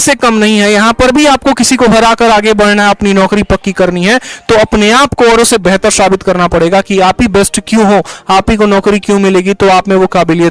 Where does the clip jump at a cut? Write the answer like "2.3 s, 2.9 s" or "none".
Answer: none